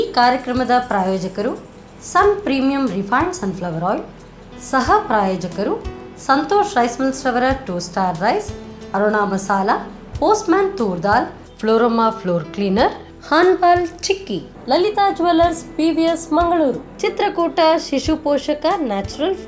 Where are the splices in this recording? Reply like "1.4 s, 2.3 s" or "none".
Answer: none